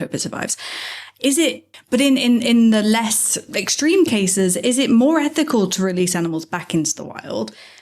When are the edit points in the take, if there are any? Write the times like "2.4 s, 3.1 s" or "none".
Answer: 1.7 s